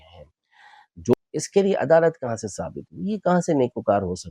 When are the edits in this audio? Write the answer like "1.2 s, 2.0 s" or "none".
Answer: 1.1 s